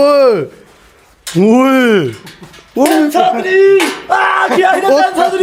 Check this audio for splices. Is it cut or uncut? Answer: uncut